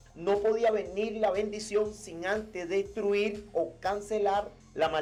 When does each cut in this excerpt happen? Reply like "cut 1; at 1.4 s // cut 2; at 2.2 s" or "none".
none